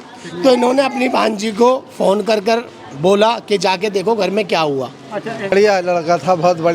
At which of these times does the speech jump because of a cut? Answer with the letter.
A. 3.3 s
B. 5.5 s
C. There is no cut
B